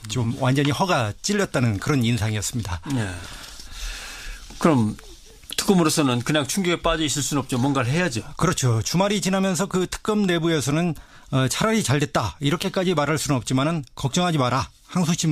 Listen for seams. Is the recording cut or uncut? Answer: uncut